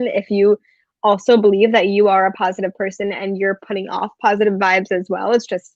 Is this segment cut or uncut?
uncut